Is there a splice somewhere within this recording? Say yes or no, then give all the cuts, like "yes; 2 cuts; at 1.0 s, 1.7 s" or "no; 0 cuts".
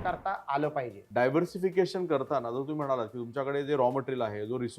yes; 1 cut; at 1.0 s